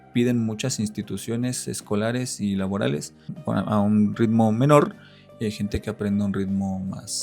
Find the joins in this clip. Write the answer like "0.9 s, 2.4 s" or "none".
3.3 s